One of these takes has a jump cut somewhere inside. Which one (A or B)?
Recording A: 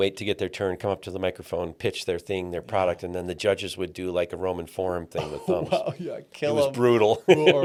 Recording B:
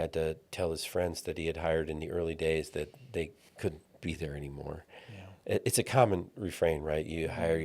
B